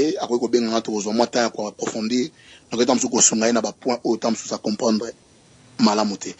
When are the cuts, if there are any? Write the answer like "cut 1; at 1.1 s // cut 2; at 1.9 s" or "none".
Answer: none